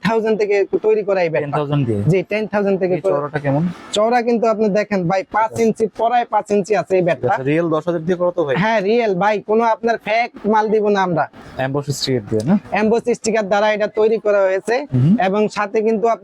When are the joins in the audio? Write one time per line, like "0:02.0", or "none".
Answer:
0:11.4